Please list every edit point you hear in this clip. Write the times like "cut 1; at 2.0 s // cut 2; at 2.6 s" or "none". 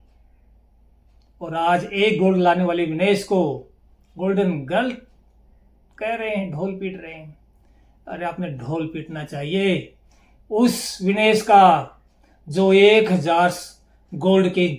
none